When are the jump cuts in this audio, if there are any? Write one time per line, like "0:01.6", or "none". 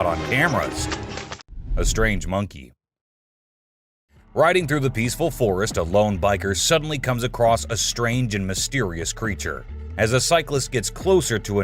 0:01.2